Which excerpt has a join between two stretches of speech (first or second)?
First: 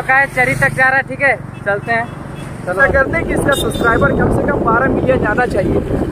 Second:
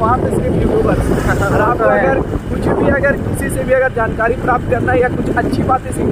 first